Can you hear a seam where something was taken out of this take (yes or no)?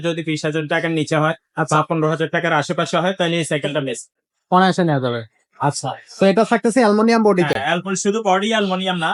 no